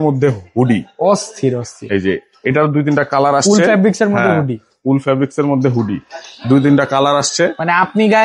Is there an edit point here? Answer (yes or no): no